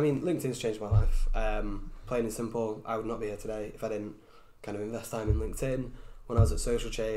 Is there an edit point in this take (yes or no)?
no